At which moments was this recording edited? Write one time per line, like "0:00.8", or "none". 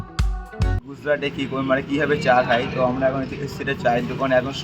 0:00.9